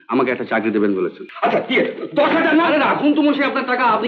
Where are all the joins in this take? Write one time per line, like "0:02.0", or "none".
0:01.2